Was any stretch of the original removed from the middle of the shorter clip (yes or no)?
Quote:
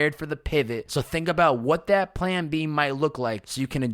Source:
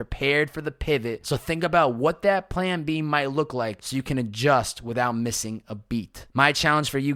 no